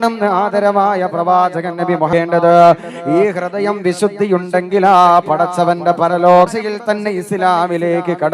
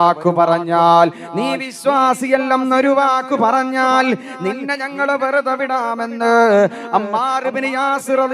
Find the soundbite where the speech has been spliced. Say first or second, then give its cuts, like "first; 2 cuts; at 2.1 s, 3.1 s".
first; 2 cuts; at 2.1 s, 6.5 s